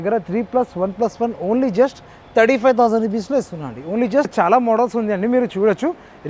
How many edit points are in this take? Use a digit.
1